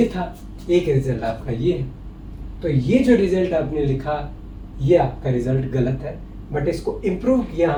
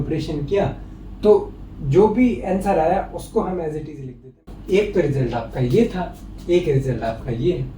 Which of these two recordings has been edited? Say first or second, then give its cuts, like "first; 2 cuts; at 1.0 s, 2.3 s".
second; 1 cut; at 4.5 s